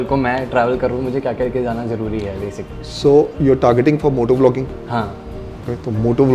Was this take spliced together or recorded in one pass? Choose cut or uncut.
uncut